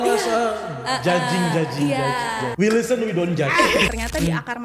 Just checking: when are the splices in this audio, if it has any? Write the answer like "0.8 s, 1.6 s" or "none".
2.4 s, 3.9 s